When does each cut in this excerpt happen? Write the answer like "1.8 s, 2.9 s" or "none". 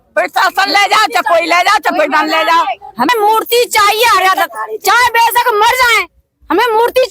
3.1 s